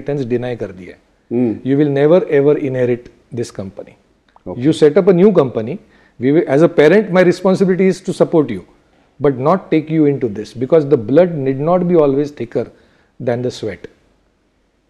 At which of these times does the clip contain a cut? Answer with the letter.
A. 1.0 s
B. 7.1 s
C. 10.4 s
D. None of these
D